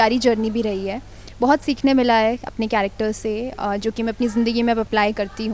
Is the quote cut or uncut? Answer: uncut